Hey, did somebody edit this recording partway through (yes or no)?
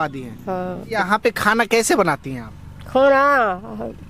yes